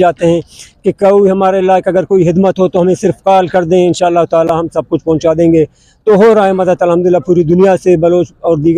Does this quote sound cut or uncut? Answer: uncut